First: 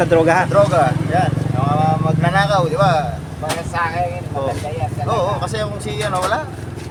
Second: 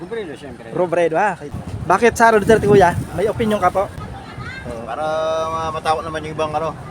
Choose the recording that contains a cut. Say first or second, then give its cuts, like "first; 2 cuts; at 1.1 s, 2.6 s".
second; 2 cuts; at 1.5 s, 4.0 s